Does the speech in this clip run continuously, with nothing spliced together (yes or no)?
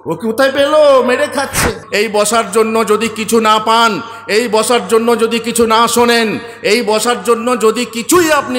no